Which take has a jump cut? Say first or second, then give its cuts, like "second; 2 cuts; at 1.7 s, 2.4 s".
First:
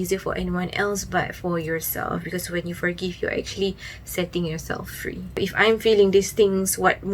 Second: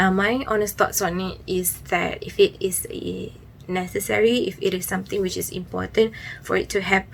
first; 1 cut; at 5.4 s